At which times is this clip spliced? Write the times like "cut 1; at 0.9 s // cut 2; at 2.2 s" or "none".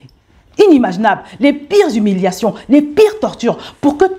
none